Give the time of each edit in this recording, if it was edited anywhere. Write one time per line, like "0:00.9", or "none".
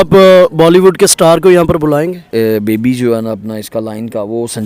0:02.2